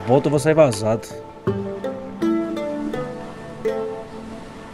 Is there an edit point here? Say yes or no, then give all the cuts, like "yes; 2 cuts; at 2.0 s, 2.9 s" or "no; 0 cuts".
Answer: no; 0 cuts